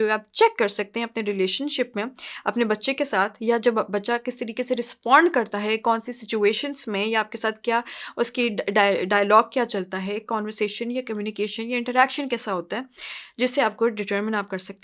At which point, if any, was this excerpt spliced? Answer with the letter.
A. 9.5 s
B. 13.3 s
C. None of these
C